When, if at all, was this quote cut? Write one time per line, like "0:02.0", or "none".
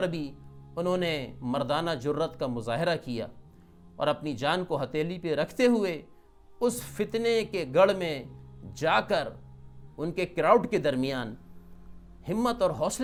none